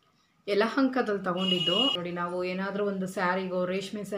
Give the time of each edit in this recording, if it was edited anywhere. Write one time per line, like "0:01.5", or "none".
0:02.0